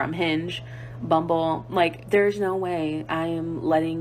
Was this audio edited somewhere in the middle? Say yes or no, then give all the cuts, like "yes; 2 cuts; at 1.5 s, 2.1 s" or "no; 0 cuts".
yes; 1 cut; at 2.0 s